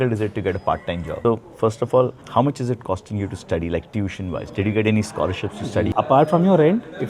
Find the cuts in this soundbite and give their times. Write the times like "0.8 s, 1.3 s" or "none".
1.1 s, 5.9 s